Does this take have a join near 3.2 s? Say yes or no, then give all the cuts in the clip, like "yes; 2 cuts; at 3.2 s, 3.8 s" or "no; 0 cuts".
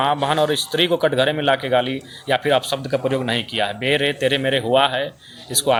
no; 0 cuts